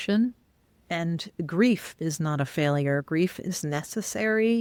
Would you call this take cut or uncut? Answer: uncut